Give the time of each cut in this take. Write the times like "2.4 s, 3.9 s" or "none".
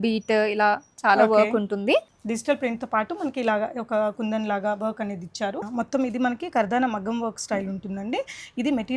2.1 s, 5.7 s